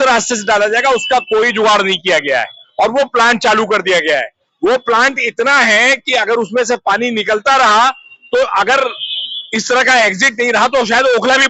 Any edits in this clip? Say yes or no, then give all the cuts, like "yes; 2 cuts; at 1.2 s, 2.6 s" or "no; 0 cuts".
no; 0 cuts